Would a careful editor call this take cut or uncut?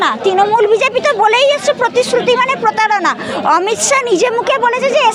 uncut